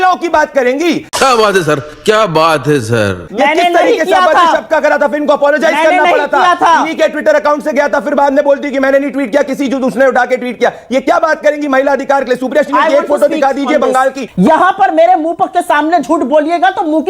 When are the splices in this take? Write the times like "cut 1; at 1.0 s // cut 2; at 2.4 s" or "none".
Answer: cut 1; at 14.2 s

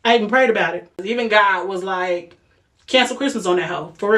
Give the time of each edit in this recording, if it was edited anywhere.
cut 1; at 1.1 s

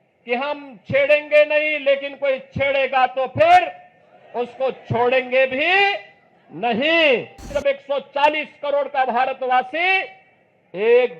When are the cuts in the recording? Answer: cut 1; at 7.6 s

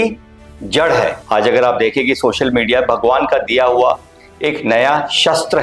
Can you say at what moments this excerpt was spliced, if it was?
cut 1; at 1.2 s

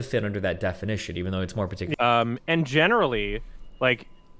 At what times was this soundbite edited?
cut 1; at 1.9 s

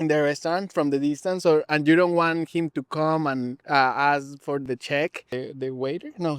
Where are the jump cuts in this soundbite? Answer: cut 1; at 3.6 s // cut 2; at 4.6 s // cut 3; at 5.3 s

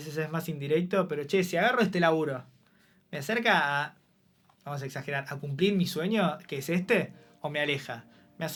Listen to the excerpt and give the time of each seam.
none

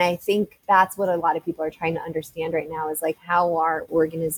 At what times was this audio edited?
none

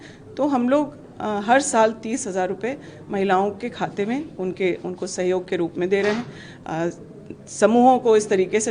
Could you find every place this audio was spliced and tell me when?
none

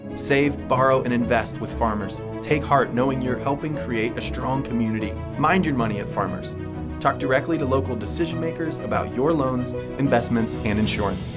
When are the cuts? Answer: none

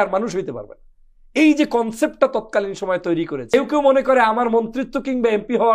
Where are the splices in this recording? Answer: cut 1; at 3.5 s

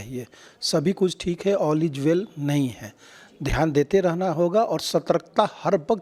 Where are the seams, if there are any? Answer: none

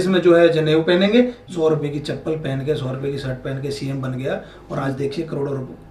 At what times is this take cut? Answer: cut 1; at 1.4 s

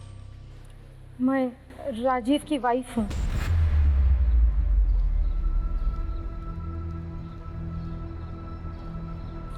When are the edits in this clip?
cut 1; at 3.2 s

